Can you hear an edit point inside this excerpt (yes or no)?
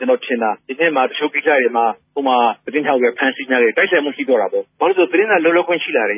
yes